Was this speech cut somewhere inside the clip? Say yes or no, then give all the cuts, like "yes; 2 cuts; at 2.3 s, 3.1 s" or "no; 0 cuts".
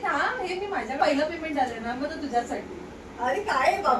yes; 1 cut; at 1.0 s